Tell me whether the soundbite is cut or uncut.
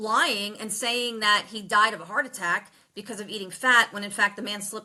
uncut